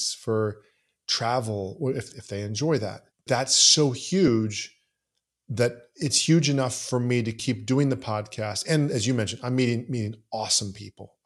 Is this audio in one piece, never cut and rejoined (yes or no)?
no